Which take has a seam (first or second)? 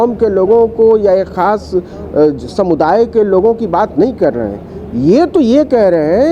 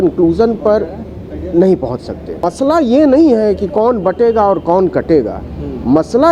second